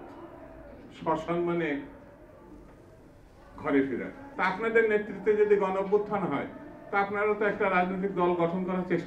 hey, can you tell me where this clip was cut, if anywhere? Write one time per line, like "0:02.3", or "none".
0:04.2